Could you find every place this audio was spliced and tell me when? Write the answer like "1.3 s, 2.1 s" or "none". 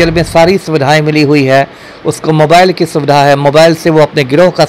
none